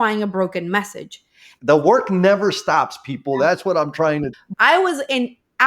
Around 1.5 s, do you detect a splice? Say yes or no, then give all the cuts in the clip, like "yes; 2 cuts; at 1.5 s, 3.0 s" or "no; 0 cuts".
yes; 2 cuts; at 1.5 s, 4.4 s